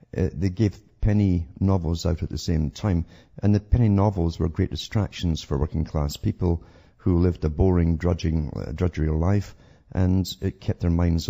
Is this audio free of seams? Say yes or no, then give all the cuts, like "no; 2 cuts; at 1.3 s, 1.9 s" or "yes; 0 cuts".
no; 1 cut; at 7.5 s